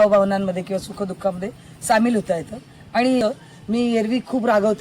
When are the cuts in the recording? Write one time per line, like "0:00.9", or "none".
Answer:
0:03.2